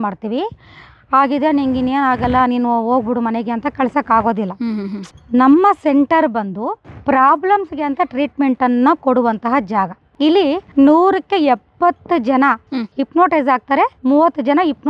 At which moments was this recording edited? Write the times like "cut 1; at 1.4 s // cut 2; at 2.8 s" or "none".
cut 1; at 5.1 s // cut 2; at 10.0 s